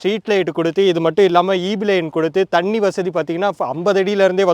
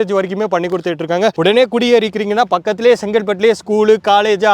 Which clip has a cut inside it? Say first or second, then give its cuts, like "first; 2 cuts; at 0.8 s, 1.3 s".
second; 1 cut; at 1.4 s